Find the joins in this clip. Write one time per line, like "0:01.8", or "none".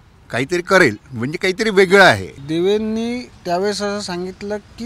0:02.3